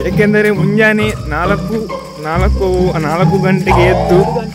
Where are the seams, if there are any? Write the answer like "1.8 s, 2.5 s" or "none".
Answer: none